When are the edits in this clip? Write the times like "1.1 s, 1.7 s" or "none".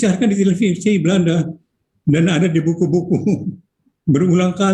1.6 s